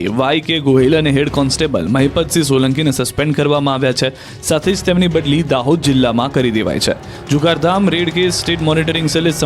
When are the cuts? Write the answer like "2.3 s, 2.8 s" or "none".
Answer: 6.8 s